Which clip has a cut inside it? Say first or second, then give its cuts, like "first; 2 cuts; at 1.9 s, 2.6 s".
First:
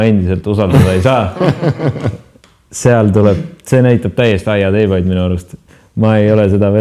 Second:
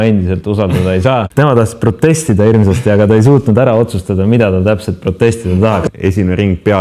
second; 2 cuts; at 1.3 s, 5.8 s